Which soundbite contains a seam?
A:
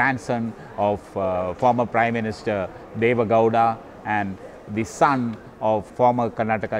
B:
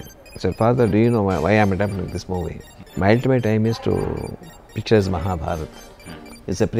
A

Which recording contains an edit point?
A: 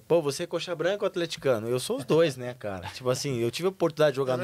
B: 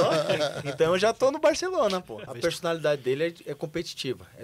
B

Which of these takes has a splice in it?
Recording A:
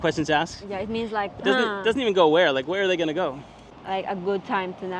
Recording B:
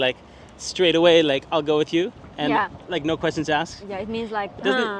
A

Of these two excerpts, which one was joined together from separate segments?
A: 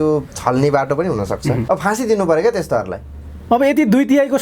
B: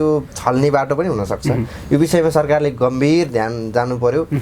A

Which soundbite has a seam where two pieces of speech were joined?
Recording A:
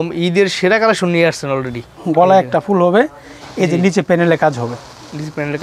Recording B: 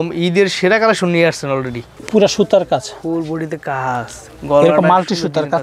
A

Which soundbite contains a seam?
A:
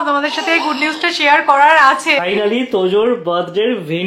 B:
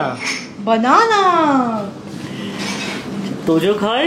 A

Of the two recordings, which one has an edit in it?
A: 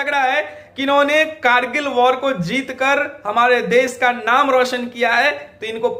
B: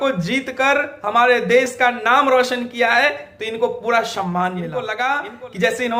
B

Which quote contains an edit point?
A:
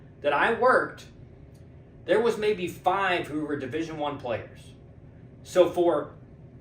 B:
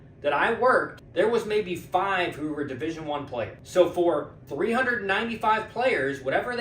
B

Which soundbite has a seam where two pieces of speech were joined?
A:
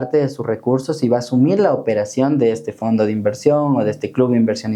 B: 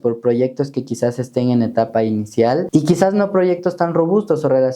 B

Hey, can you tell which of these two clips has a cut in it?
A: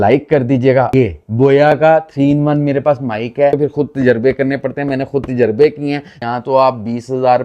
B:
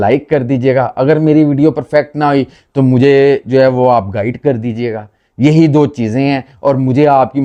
A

